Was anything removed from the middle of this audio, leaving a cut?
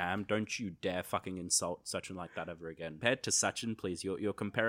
yes; 1 cut; at 3.0 s

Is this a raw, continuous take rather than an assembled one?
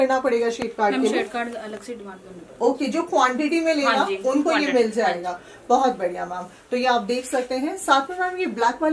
yes; 0 cuts

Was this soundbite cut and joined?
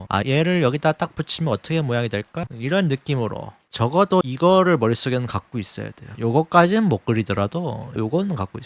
yes; 1 cut; at 2.4 s

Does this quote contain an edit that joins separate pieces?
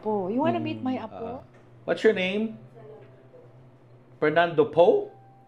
yes; 1 cut; at 1.1 s

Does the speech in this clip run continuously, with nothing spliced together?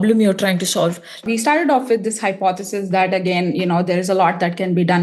no; 1 cut; at 1.2 s

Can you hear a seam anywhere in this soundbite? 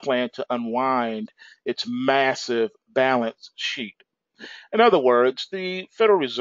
no; 0 cuts

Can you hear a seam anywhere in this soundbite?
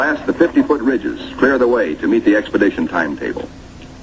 yes; 1 cut; at 1.1 s

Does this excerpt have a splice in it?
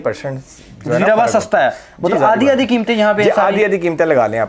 no; 0 cuts

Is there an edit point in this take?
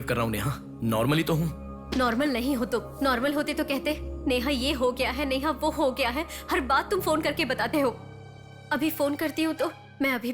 no; 0 cuts

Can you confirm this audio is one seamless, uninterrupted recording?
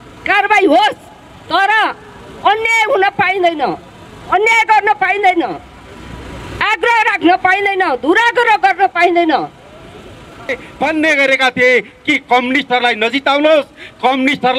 no; 1 cut; at 10.6 s

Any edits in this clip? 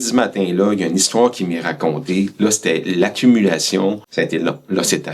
yes; 1 cut; at 4.0 s

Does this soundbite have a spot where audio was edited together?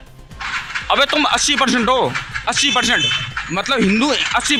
no; 0 cuts

